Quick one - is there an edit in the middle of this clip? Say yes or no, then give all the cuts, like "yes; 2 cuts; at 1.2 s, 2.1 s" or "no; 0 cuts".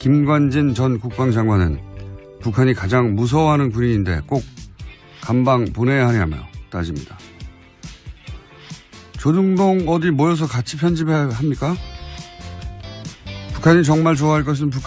yes; 1 cut; at 7.9 s